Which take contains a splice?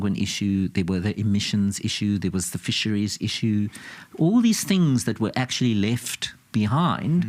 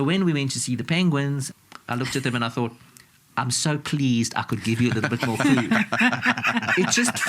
second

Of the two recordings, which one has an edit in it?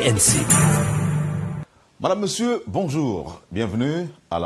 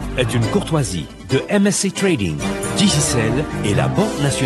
first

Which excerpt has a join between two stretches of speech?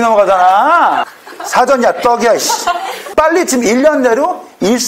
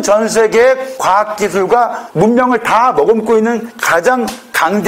first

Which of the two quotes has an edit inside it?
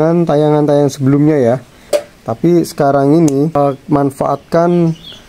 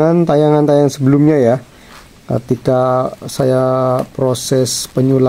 first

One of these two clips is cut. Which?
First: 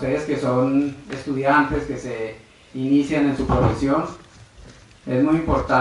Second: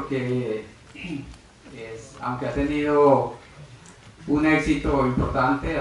second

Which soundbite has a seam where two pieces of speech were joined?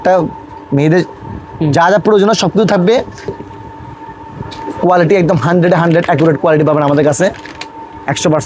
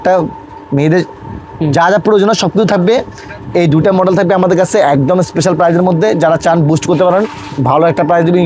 first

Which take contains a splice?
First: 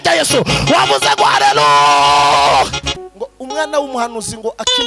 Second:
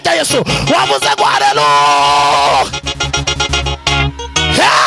first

